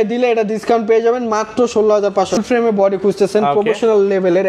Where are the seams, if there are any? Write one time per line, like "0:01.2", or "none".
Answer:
0:02.4